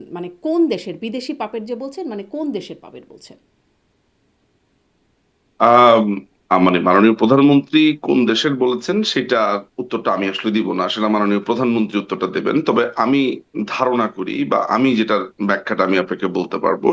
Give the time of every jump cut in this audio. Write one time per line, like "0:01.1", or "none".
none